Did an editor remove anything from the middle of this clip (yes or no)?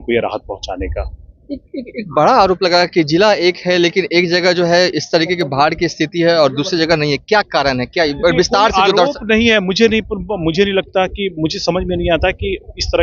no